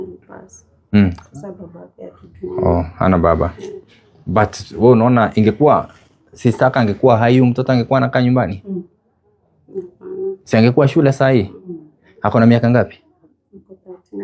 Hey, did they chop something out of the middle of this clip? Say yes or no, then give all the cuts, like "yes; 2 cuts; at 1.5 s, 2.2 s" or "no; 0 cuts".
no; 0 cuts